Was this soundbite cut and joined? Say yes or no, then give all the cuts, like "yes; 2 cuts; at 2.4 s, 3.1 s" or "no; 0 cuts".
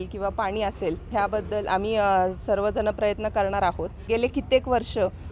yes; 2 cuts; at 1.1 s, 4.0 s